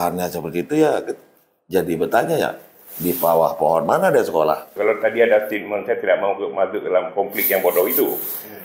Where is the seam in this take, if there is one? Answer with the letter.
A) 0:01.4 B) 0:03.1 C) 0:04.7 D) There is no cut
C